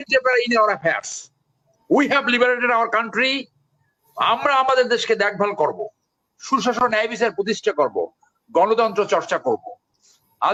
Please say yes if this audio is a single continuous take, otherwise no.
yes